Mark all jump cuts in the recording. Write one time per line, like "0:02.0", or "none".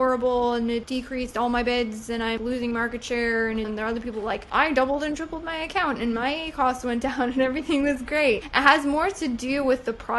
0:00.9
0:02.4
0:03.7